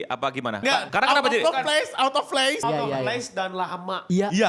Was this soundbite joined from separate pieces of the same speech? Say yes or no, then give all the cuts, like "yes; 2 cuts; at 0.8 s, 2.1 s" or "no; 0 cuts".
yes; 2 cuts; at 0.9 s, 2.6 s